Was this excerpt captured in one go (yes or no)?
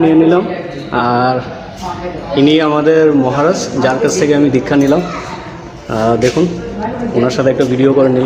yes